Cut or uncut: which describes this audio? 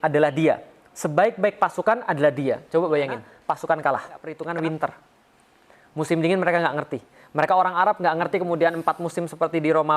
cut